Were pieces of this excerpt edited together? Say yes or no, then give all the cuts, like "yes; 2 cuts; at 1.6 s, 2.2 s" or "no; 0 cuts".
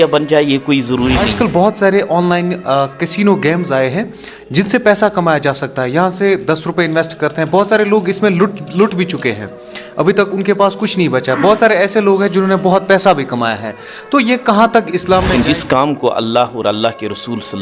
yes; 2 cuts; at 1.3 s, 15.3 s